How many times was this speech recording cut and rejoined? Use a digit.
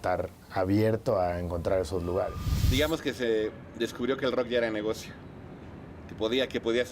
1